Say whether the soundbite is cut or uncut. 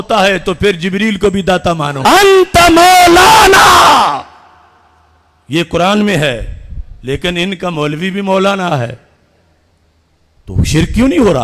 cut